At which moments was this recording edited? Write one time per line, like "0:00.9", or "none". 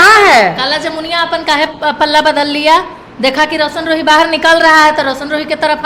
none